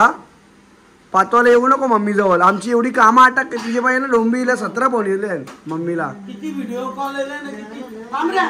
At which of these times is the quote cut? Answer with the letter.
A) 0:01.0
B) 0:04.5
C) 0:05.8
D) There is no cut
D